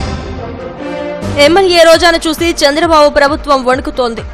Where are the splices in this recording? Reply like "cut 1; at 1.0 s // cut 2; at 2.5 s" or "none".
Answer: cut 1; at 1.2 s